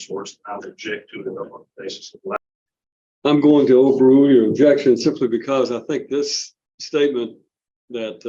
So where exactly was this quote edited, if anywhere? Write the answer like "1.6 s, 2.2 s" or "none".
2.4 s